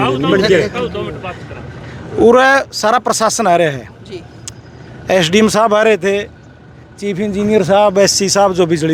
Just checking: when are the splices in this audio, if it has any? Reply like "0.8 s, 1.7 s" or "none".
none